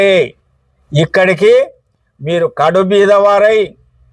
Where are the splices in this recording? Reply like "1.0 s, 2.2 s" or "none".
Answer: none